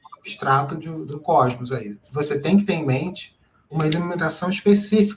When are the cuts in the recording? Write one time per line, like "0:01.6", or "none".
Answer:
0:01.1
0:02.0
0:03.7